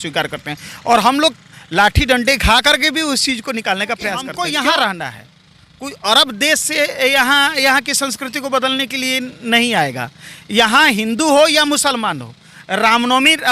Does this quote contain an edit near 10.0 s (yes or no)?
no